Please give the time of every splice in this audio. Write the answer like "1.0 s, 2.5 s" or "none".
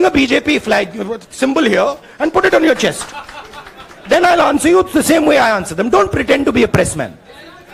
none